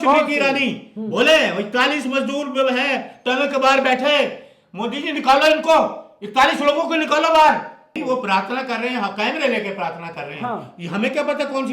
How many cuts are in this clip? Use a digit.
1